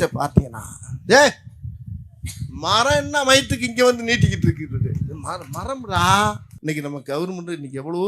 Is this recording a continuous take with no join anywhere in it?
no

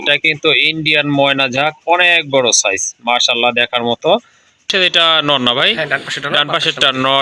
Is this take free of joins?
no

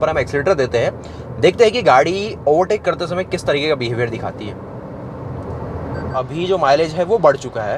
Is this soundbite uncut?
no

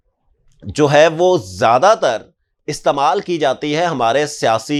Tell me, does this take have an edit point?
no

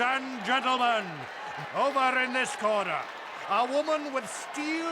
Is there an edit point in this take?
yes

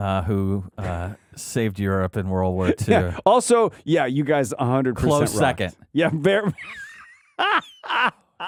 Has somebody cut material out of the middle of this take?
no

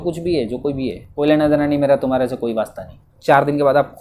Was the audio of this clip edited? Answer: yes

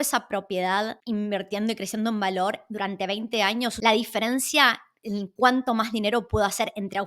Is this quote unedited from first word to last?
no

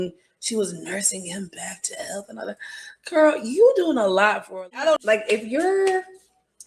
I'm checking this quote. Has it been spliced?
yes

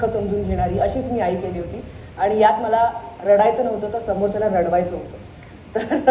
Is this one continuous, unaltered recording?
yes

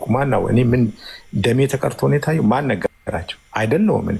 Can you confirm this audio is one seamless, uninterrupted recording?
yes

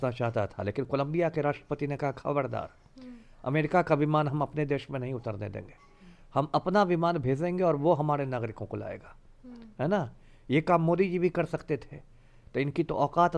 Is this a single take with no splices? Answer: yes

